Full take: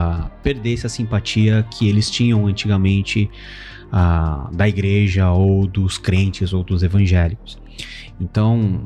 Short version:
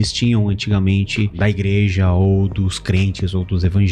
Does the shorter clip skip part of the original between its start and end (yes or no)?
yes